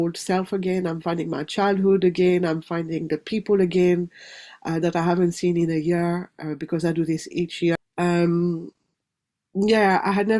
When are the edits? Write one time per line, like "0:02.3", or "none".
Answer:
0:07.8